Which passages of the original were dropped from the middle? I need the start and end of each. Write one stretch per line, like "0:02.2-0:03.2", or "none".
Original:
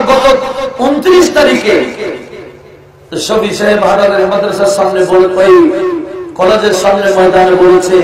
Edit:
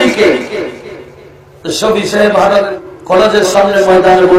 0:04.2-0:06.0

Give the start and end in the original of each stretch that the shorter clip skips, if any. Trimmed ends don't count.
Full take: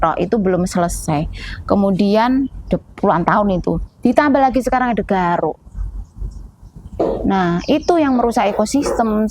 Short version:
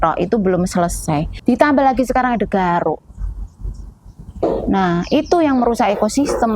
0:01.3-0:03.9

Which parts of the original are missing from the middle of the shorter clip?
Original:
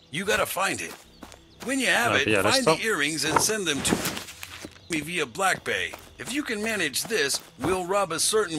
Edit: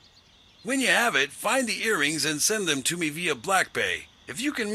0:03.8-0:04.8

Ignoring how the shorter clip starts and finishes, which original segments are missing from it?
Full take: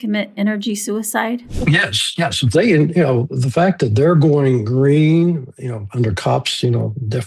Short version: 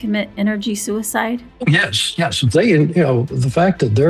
none

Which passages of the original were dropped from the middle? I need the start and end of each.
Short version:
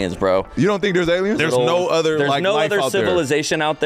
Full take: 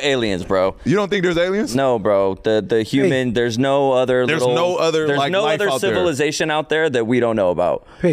0:01.7-0:04.3

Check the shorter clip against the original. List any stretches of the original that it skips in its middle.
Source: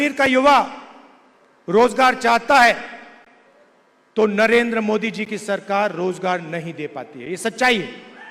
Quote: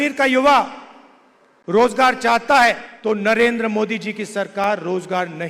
0:02.9-0:04.0

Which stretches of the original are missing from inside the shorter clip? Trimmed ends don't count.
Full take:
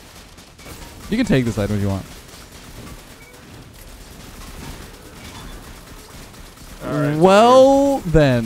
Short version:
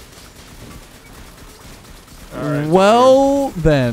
0:03.3-0:05.6

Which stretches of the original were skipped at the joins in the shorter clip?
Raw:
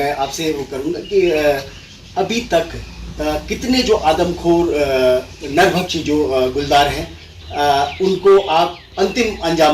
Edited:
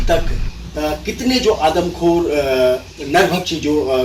none

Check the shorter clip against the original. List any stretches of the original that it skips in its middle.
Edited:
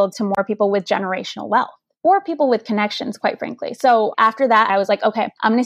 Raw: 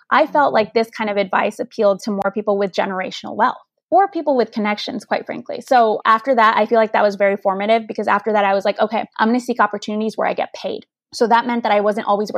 0:06.6-0:08.5

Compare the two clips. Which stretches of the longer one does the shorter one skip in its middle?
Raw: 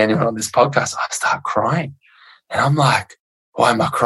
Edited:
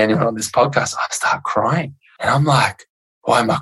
0:02.0-0:02.3

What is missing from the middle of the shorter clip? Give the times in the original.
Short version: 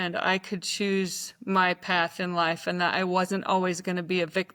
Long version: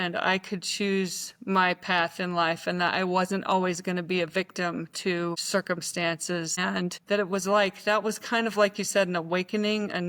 none

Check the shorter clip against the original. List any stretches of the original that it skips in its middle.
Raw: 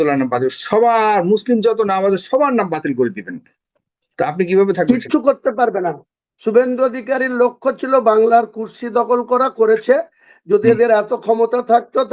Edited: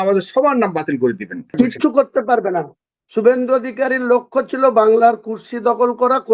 0:03.5-0:04.9

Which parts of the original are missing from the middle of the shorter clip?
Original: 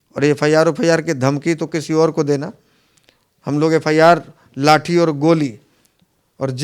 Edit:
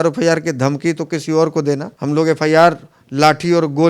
0:02.5-0:03.4

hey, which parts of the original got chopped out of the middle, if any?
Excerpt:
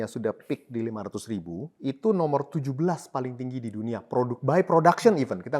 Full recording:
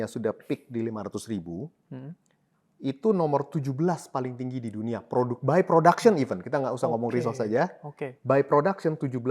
0:01.7-0:02.7

